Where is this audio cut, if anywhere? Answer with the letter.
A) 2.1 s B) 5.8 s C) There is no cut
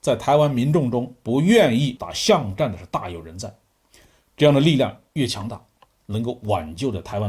A